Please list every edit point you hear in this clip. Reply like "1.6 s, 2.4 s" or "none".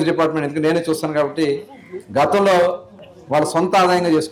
none